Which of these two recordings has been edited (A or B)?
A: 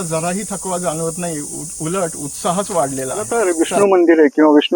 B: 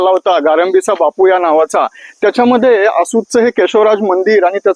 A